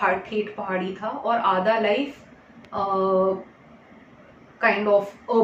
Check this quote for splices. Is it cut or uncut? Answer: uncut